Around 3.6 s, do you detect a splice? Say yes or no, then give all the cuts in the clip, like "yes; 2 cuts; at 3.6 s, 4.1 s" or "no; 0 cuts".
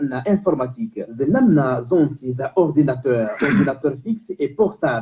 no; 1 cut; at 2.3 s